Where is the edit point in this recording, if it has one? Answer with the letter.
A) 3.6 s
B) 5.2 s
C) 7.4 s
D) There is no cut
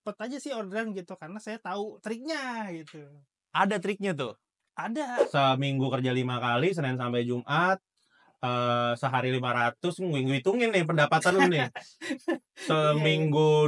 B